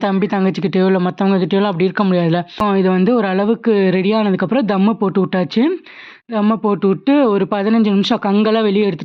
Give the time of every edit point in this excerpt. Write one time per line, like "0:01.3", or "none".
0:02.6